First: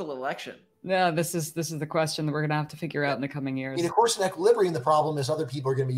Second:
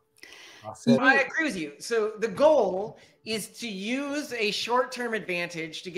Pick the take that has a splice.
second; 1 cut; at 1.0 s

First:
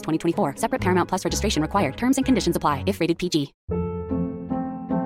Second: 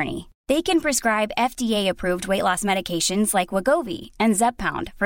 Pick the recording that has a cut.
first; 1 cut; at 3.6 s

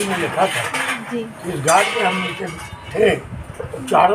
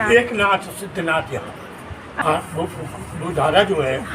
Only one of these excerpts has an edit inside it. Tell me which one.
second; 1 cut; at 2.1 s

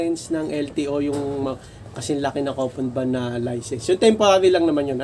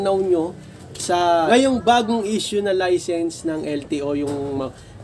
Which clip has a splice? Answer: second; 1 cut; at 1.5 s

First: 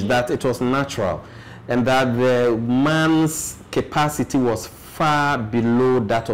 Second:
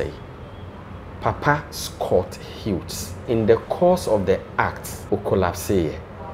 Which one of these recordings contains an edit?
second; 2 cuts; at 3.2 s, 4.9 s

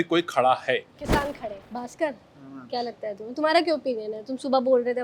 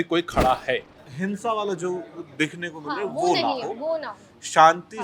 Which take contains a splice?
second; 1 cut; at 0.9 s

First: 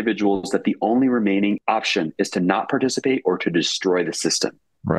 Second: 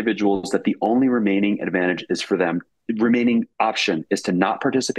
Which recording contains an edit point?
first; 1 cut; at 1.6 s

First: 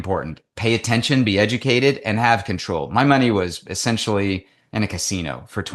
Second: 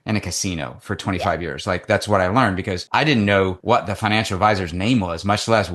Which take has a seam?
second; 2 cuts; at 2.8 s, 3.6 s

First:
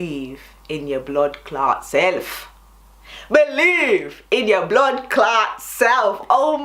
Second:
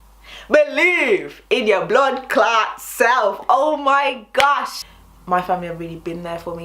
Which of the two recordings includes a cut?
second; 1 cut; at 4.8 s

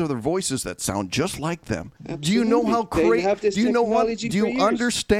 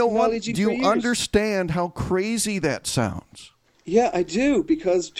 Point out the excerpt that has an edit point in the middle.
first; 1 cut; at 2.0 s

